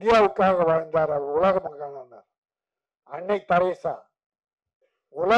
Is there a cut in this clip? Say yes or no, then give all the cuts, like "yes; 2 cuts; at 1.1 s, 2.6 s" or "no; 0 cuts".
no; 0 cuts